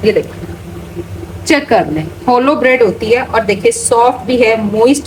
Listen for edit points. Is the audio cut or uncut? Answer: uncut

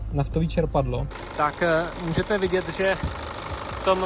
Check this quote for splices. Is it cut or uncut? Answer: cut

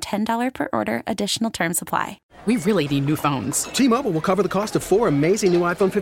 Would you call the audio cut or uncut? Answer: cut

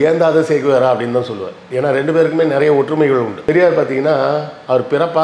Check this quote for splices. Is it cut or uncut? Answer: uncut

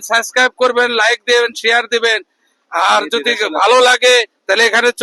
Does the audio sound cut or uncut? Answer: uncut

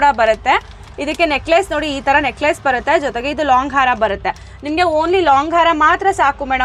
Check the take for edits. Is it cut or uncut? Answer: uncut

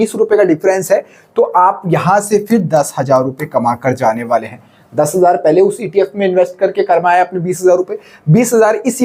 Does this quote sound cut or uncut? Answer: uncut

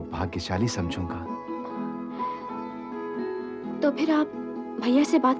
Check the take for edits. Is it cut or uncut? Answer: uncut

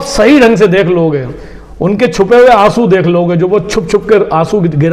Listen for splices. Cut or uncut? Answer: uncut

